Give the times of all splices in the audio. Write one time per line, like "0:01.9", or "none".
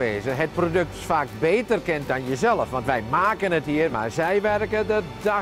0:03.9